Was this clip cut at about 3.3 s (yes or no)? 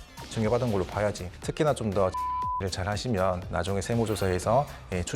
no